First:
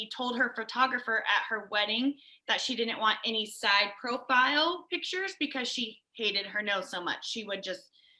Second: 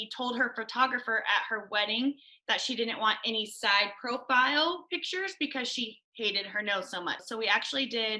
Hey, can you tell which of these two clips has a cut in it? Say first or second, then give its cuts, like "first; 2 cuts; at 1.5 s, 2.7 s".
second; 1 cut; at 7.2 s